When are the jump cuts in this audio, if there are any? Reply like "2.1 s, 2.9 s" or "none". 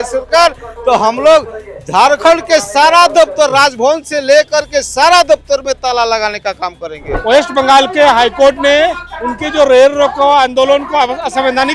7.1 s